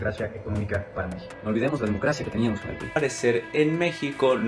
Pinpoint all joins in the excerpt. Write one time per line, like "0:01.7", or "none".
0:03.0